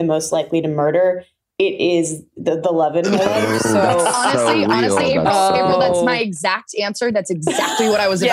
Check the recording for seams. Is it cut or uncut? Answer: uncut